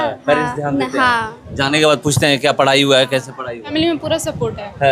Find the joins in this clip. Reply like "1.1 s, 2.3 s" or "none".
3.7 s